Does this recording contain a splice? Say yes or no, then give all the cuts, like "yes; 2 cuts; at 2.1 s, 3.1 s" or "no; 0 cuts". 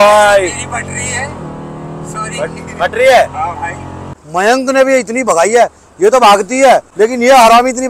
yes; 2 cuts; at 4.2 s, 6.9 s